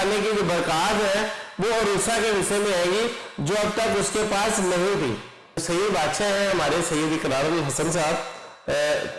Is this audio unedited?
yes; 0 cuts

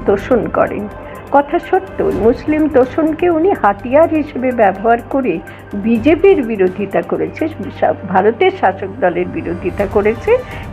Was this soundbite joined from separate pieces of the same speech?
no; 0 cuts

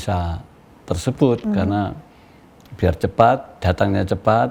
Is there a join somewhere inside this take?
no; 0 cuts

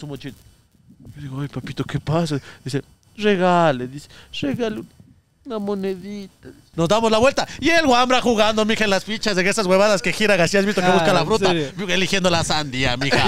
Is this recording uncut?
no; 1 cut; at 6.6 s

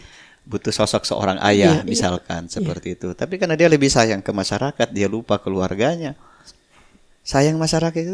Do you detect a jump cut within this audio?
no; 0 cuts

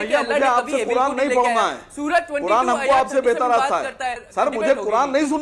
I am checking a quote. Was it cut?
yes; 1 cut; at 4.2 s

